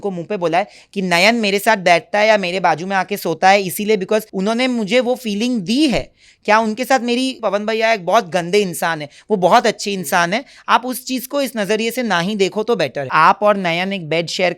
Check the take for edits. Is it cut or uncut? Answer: cut